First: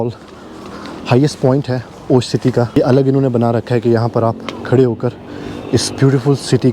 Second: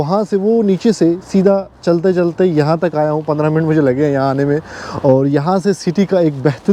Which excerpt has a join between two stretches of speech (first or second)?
first